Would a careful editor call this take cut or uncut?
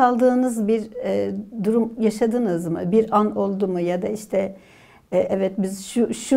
uncut